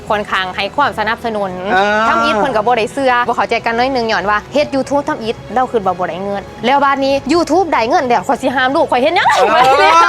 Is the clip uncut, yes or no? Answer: no